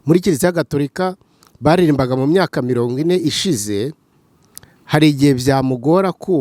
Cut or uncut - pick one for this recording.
uncut